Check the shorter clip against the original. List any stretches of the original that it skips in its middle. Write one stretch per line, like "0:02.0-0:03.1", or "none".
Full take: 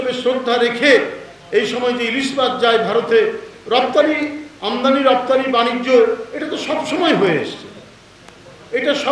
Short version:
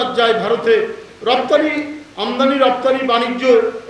none

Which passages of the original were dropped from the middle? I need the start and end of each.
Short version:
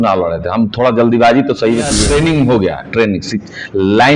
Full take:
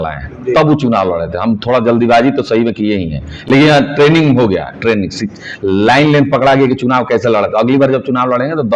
0:02.9-0:03.9

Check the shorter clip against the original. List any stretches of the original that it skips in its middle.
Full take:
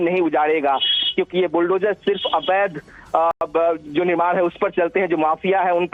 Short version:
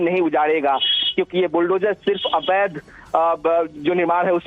0:03.4-0:03.5

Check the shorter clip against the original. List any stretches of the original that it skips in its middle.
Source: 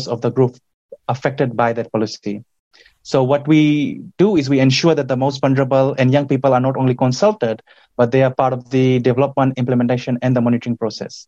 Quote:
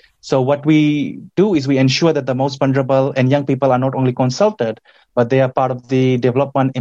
none

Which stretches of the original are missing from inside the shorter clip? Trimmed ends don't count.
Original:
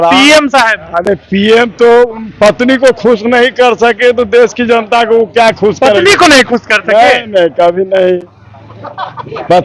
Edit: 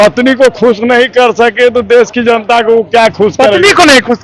none

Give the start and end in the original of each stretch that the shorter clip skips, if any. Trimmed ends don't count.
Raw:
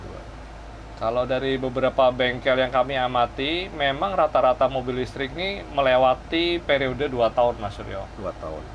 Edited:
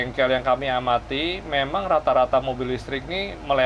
none

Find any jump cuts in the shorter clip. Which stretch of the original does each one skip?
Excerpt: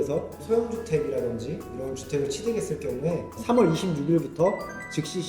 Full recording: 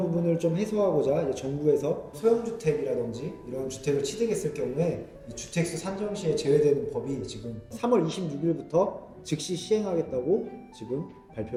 0:05.1-0:07.7

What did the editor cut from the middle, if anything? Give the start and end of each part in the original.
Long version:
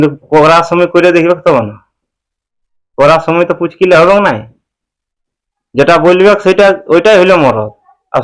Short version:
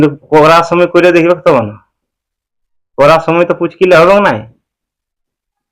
none

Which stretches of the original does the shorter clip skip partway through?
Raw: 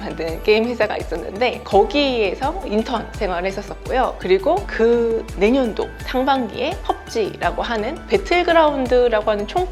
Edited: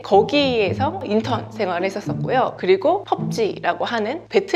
0:04.6-0:06.8

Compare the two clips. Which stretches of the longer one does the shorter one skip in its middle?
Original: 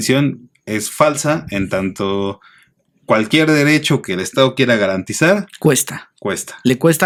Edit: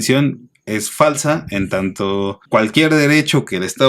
0:02.4-0:03.0

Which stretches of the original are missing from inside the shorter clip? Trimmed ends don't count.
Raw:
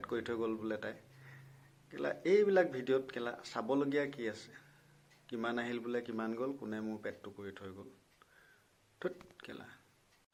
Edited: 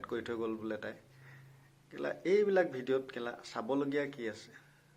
none

